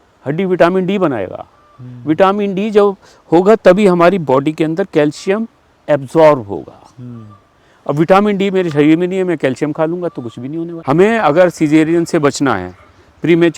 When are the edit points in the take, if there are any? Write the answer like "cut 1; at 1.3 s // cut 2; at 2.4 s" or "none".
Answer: cut 1; at 10.7 s

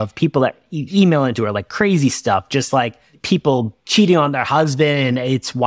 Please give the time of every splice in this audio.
cut 1; at 3.4 s

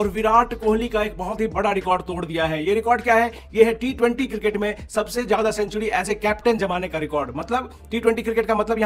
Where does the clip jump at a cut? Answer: none

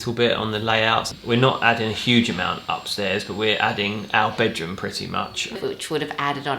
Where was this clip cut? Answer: cut 1; at 1.2 s // cut 2; at 5.5 s

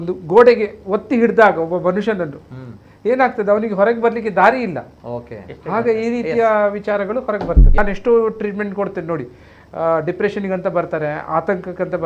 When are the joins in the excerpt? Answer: cut 1; at 7.8 s

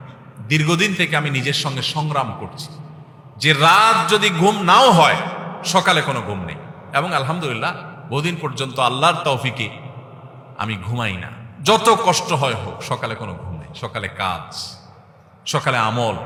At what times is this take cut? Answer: none

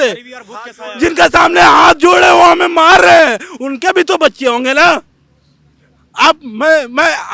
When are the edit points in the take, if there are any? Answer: none

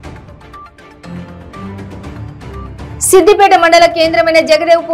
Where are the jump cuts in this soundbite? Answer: cut 1; at 1.0 s

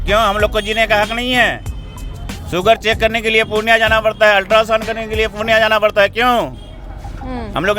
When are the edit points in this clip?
none

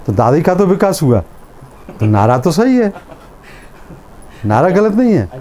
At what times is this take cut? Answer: none

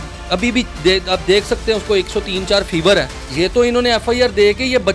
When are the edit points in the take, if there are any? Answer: cut 1; at 3.2 s

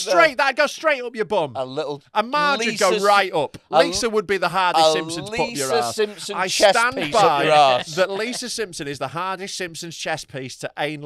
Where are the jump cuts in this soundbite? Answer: none

